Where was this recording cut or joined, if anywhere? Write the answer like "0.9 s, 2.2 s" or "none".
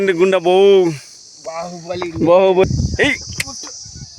2.6 s

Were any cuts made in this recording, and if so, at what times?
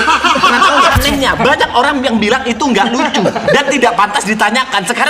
0.9 s

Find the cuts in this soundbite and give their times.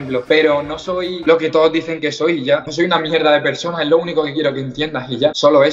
none

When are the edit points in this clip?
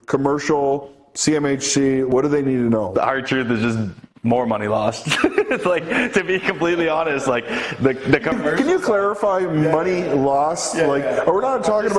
2.1 s, 2.9 s

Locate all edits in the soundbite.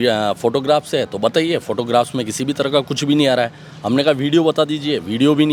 none

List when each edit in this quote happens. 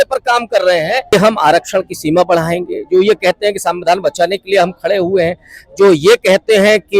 1.1 s

